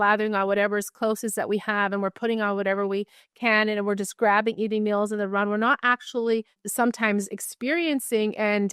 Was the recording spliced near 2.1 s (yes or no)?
no